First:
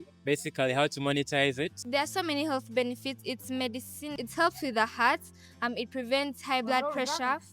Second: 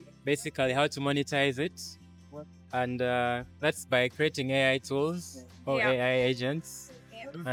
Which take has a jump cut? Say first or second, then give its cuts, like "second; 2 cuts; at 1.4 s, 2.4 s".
first; 2 cuts; at 1.8 s, 4.1 s